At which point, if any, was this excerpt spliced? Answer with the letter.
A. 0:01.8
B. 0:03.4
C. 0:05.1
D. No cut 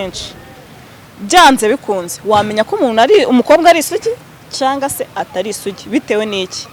D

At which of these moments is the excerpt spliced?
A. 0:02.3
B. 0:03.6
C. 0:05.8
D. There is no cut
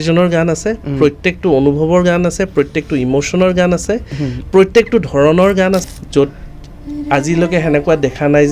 C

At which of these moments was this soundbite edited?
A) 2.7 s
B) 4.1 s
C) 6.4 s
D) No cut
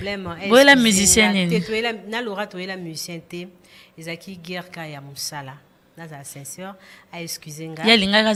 D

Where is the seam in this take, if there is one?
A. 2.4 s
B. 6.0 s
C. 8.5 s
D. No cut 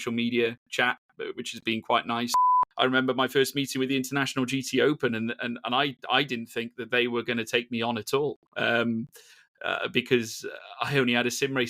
A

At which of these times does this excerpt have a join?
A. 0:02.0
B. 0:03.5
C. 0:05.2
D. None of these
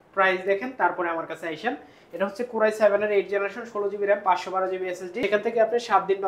C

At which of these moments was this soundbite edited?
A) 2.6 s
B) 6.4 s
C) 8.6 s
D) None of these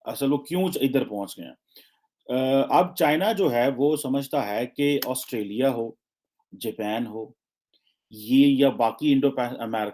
D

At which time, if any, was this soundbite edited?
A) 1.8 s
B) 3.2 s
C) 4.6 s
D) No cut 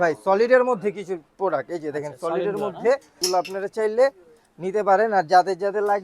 B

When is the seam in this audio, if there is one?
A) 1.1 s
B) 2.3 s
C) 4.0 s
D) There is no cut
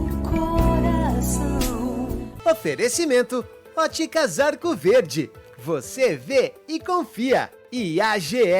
B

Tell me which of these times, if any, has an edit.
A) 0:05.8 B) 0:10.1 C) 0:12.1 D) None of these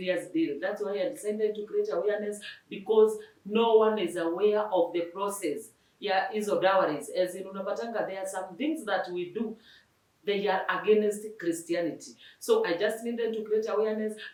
D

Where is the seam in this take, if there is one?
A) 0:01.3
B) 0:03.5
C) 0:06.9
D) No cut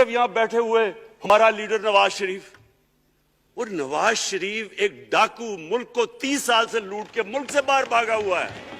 A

